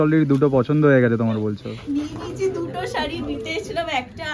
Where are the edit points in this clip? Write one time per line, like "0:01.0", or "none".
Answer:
0:01.7